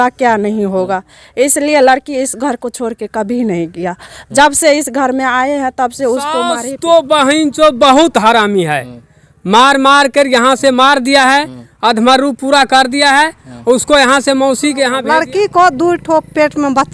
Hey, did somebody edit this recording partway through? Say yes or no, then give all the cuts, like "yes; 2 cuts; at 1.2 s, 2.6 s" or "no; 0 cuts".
yes; 2 cuts; at 6.6 s, 15.0 s